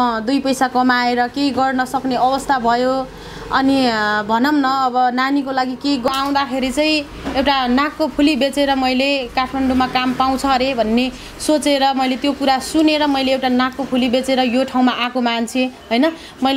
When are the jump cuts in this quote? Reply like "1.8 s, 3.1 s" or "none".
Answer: 6.1 s